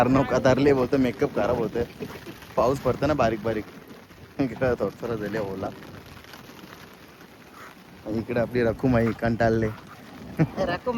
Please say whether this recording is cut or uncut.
uncut